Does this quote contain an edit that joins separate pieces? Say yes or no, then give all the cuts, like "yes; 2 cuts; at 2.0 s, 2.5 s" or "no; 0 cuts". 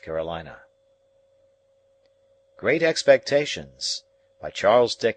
no; 0 cuts